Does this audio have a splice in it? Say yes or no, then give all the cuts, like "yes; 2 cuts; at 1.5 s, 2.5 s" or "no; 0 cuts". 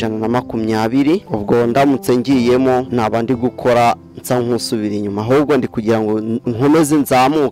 yes; 2 cuts; at 1.2 s, 2.9 s